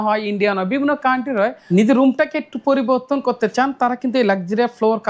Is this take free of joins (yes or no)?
no